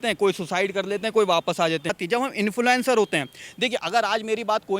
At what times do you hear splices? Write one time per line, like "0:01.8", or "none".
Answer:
0:02.0